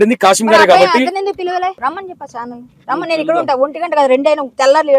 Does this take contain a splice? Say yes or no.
yes